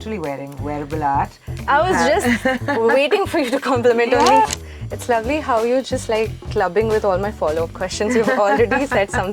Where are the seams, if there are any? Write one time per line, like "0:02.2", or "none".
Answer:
0:04.5